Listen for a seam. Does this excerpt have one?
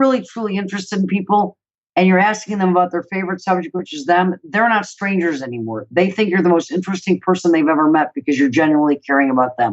no; 0 cuts

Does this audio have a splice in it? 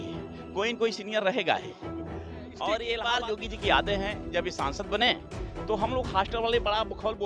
yes; 1 cut; at 3.0 s

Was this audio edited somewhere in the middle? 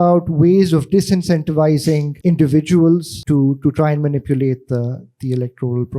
yes; 2 cuts; at 2.1 s, 3.1 s

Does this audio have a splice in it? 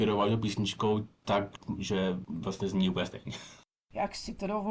yes; 1 cut; at 3.7 s

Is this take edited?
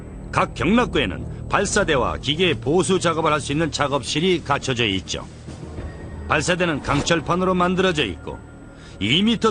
yes; 1 cut; at 5.2 s

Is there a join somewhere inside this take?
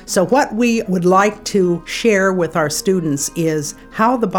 yes; 2 cuts; at 0.9 s, 1.9 s

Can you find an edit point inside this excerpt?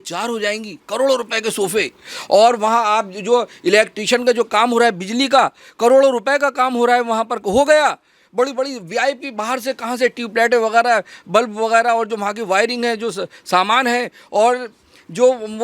no; 0 cuts

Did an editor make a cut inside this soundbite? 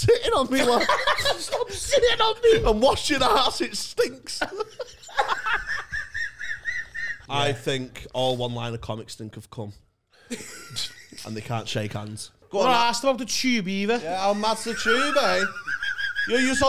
yes; 2 cuts; at 7.2 s, 12.4 s

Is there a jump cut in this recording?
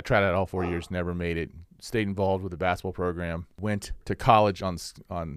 no; 0 cuts

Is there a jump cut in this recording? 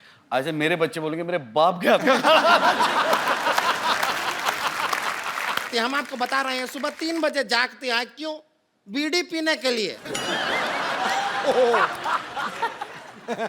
yes; 1 cut; at 5.7 s

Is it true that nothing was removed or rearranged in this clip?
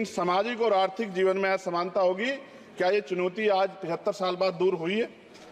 yes; 0 cuts

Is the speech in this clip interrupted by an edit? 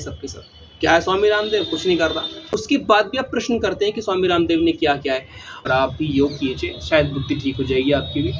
yes; 2 cuts; at 2.4 s, 5.6 s

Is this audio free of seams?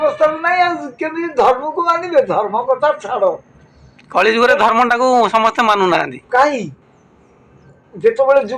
yes; 0 cuts

